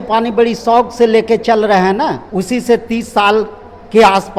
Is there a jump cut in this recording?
yes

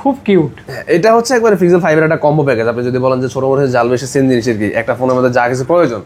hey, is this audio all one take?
yes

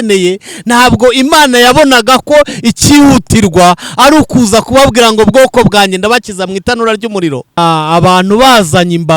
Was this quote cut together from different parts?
yes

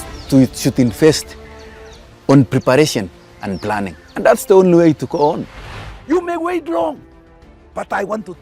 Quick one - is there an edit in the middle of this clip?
yes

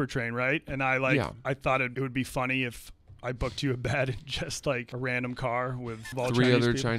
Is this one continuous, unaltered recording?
no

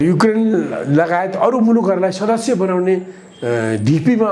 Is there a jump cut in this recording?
no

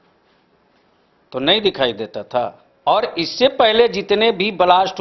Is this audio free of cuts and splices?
no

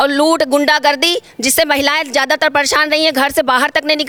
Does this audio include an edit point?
no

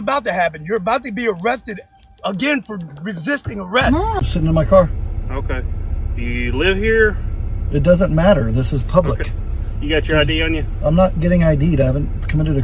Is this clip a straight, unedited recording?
no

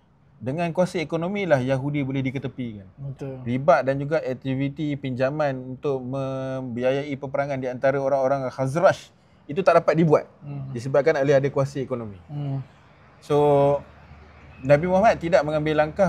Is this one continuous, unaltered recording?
yes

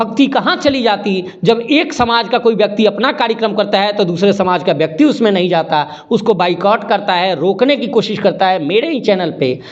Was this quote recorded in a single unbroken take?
yes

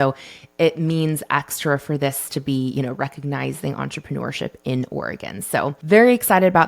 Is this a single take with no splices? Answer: no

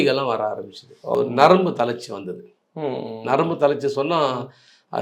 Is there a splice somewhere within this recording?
yes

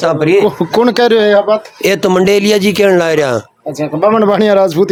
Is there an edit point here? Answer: no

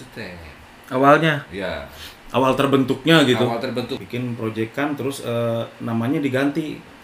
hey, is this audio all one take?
no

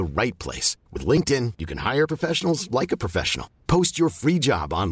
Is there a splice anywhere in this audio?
no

